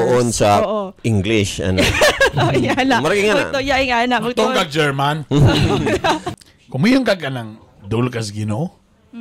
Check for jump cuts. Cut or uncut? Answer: cut